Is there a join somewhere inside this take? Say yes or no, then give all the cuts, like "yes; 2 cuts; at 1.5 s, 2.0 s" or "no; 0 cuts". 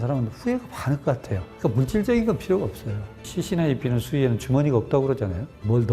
yes; 2 cuts; at 1.5 s, 3.3 s